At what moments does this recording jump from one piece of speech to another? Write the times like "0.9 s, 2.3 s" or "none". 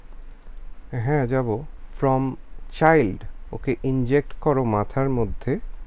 1.8 s

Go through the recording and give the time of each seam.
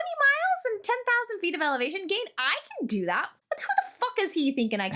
3.3 s

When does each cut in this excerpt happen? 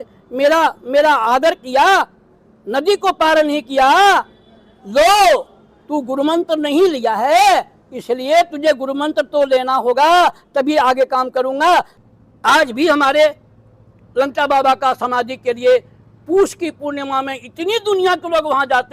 12.0 s

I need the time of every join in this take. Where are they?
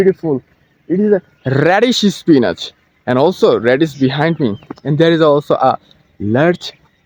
none

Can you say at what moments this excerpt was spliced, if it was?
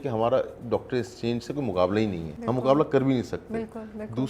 2.3 s

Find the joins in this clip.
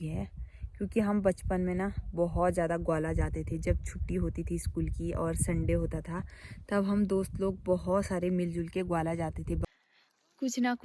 9.7 s

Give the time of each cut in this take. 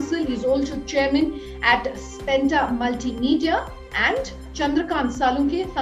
4.5 s

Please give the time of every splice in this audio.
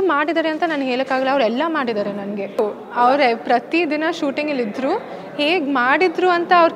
2.5 s

